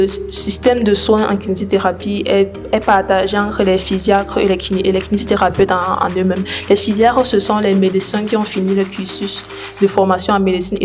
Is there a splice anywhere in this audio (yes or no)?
no